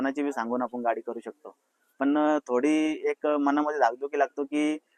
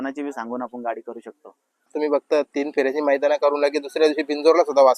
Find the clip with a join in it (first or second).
second